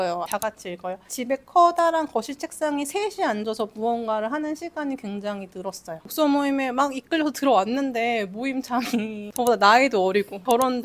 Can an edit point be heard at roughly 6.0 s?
yes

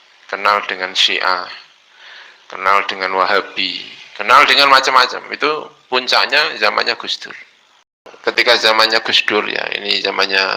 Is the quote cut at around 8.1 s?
yes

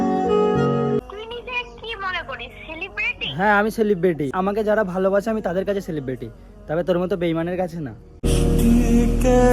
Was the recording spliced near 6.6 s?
no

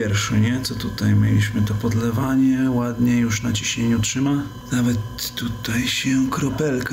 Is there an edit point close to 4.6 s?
yes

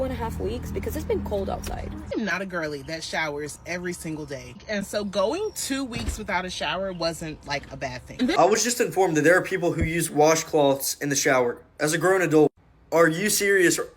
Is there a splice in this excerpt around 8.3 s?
yes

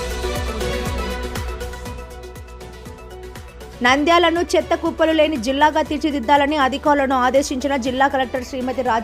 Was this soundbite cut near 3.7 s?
yes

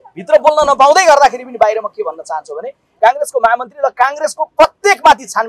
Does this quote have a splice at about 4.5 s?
no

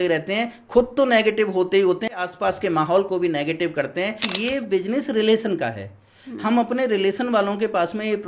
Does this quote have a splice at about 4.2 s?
yes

